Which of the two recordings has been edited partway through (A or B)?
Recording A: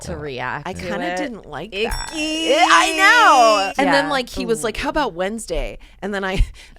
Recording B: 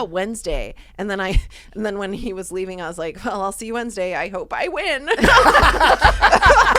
A